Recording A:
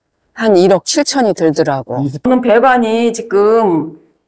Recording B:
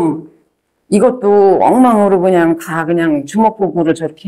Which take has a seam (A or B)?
A